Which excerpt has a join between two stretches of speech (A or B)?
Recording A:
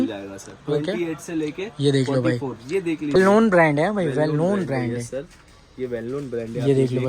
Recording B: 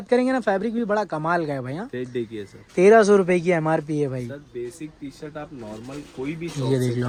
A